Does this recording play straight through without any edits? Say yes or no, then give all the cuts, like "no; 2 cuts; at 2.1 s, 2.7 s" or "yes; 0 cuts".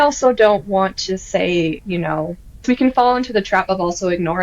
no; 1 cut; at 2.6 s